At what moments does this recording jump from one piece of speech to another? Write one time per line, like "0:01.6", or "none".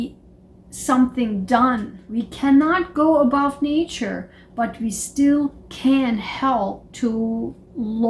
0:02.0

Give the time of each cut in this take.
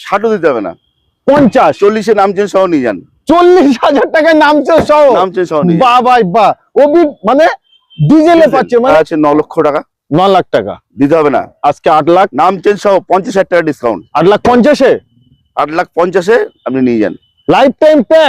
0:08.9

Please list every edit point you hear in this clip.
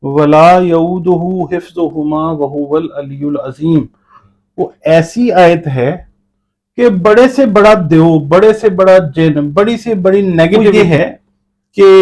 0:10.7

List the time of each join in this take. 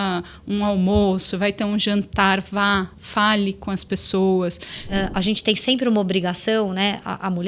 0:04.9

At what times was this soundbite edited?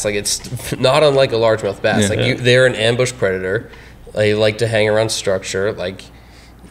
none

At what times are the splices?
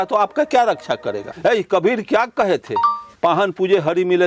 0:01.3
0:03.1

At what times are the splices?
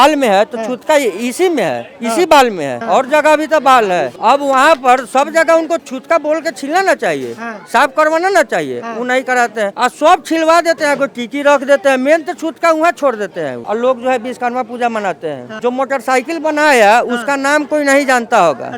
0:02.8
0:04.1
0:05.9
0:09.7
0:13.6
0:15.5

